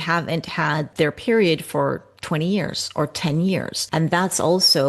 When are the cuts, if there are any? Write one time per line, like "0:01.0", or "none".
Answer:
0:00.9
0:03.8